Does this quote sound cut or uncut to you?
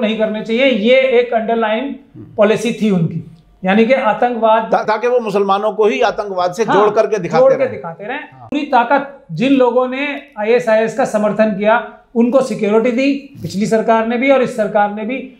cut